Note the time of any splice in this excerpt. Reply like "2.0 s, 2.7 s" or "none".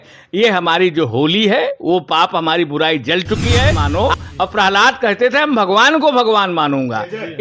3.8 s